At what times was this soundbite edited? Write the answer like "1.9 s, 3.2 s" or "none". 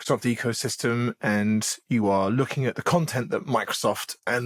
none